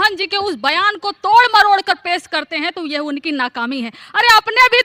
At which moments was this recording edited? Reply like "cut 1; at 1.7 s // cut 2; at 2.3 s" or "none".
none